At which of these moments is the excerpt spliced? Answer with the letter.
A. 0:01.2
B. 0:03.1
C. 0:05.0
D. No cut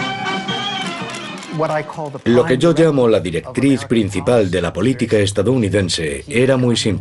A